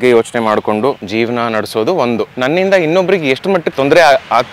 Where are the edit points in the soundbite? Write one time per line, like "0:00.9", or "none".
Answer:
0:01.0
0:02.3
0:03.7

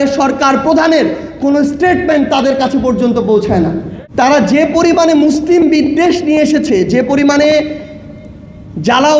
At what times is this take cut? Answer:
0:03.9

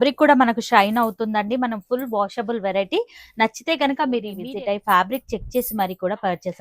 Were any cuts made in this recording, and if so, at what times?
0:04.4

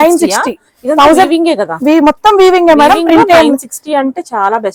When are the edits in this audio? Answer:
none

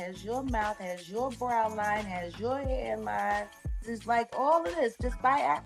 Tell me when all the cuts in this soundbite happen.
0:03.9

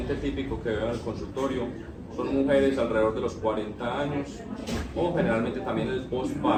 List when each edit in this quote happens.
none

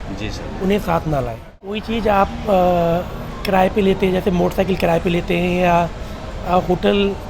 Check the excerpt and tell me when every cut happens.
0:01.8

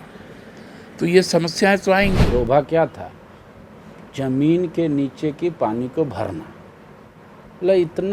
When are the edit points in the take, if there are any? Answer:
0:02.2

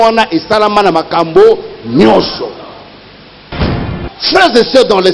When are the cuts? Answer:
0:03.8

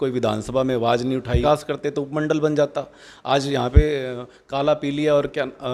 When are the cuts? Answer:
0:01.4

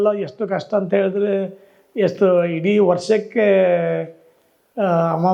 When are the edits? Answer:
none

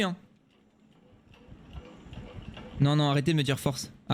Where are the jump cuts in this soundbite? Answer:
none

